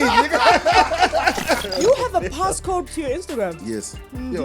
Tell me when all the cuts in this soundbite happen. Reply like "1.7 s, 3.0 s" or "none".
1.7 s, 2.9 s